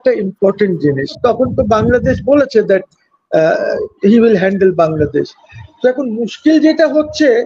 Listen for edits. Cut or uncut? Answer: cut